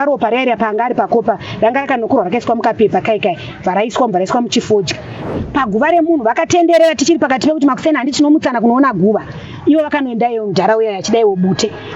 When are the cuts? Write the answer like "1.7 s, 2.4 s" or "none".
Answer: 5.2 s